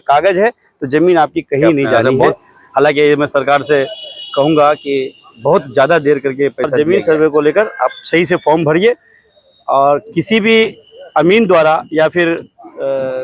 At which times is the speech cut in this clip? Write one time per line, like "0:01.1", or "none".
0:02.1
0:06.7